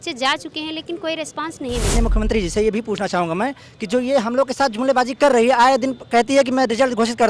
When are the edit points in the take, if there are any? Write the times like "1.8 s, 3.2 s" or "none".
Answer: 2.0 s